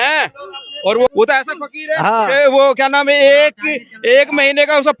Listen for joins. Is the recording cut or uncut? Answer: cut